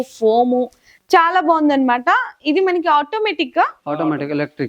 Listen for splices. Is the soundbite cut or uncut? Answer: uncut